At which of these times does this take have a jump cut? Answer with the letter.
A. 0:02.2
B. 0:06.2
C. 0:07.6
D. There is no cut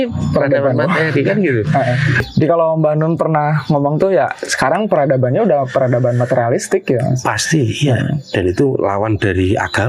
A